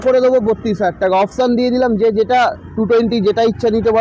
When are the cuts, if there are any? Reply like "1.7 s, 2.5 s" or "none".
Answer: none